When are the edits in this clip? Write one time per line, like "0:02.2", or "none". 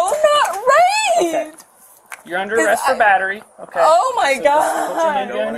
none